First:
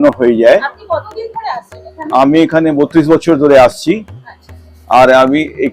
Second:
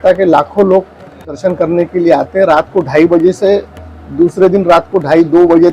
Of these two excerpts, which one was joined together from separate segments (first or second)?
second